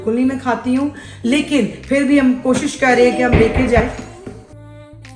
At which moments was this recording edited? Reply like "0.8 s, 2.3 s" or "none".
none